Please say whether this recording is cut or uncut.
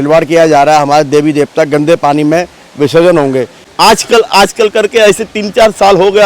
cut